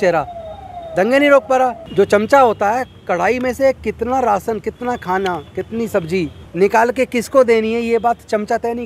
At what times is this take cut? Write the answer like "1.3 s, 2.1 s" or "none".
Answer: 1.8 s, 6.4 s